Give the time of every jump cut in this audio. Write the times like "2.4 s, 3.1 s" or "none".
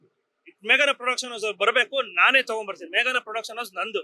none